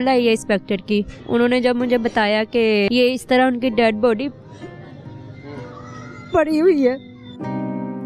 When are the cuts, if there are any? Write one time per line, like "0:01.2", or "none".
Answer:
0:01.2
0:02.9